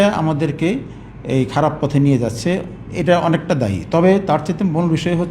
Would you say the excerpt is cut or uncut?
uncut